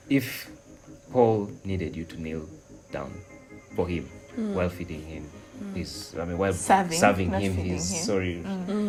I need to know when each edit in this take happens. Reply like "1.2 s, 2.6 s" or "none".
none